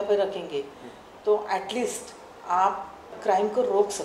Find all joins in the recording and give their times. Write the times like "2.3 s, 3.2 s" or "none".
3.1 s